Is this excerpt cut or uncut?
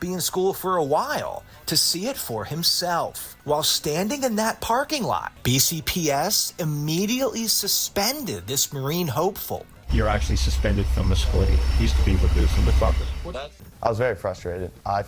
cut